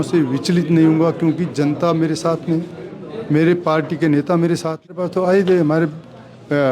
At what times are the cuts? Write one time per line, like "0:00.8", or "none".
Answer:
0:04.9